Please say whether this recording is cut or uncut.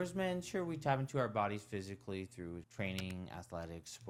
uncut